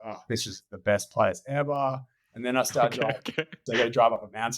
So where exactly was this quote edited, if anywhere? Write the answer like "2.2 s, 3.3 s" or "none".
3.6 s